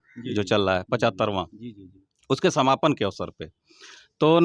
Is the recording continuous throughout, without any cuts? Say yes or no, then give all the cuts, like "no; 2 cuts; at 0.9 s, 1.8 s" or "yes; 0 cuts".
yes; 0 cuts